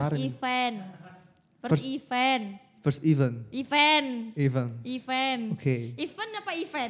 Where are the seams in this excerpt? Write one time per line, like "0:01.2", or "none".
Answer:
none

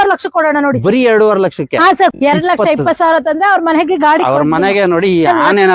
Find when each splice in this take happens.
0:02.1

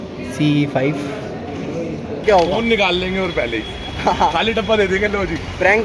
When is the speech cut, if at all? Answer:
0:02.1

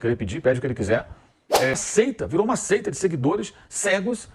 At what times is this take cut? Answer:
0:01.7

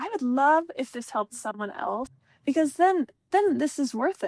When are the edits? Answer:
0:02.2

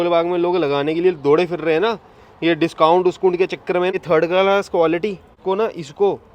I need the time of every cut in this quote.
0:03.9
0:05.3

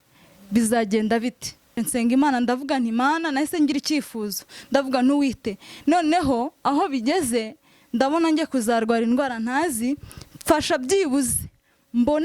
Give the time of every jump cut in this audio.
0:01.8

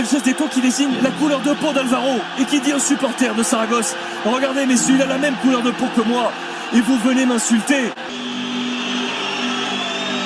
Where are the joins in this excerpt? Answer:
0:08.0

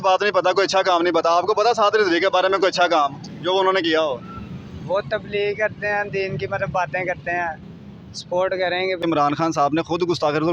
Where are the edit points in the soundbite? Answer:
0:09.0

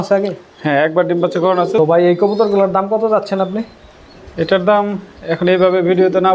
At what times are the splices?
0:01.8

